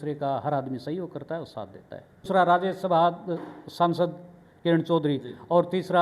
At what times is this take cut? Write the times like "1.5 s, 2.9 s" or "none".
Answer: 2.3 s